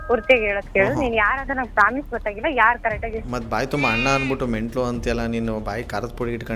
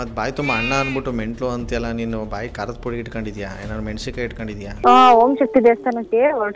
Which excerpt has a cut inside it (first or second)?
second